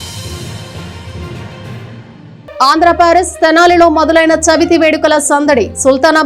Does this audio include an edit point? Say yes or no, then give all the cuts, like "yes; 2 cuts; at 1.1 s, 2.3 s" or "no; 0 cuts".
yes; 1 cut; at 2.4 s